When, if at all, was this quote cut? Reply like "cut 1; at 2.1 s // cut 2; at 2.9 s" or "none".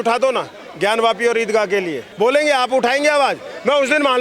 cut 1; at 2.0 s